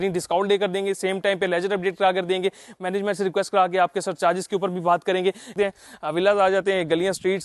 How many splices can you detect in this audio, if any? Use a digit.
1